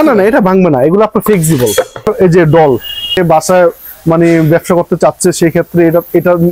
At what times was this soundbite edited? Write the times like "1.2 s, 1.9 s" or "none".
2.1 s, 3.2 s